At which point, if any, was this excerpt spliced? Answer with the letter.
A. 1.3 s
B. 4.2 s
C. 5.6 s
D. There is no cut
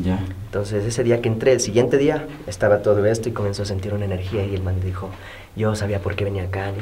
D